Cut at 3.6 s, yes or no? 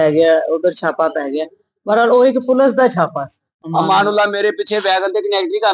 yes